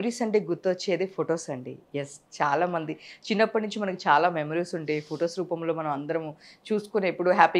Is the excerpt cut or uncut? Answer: uncut